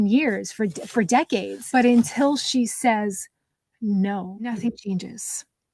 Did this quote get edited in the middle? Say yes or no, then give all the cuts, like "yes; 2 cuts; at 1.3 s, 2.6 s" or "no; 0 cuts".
yes; 2 cuts; at 1.6 s, 4.5 s